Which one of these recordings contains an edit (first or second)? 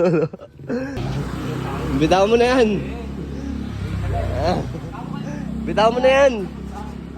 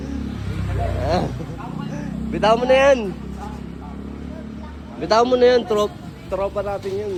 first